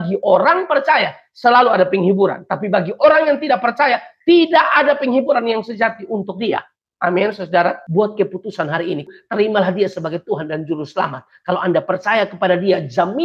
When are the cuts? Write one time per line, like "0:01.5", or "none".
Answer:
0:07.8
0:09.1